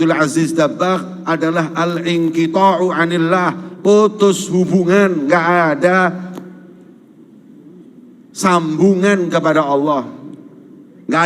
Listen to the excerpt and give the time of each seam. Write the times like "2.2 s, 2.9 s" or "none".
none